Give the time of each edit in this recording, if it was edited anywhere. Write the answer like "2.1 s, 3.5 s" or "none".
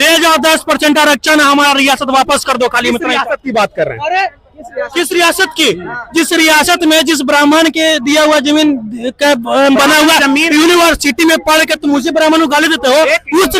none